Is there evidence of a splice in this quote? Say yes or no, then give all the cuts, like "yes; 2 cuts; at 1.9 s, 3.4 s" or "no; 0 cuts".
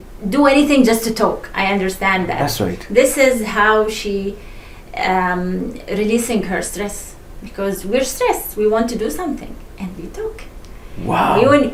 no; 0 cuts